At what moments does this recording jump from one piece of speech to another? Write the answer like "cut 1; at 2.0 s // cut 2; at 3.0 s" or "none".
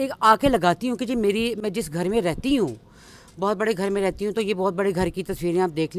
none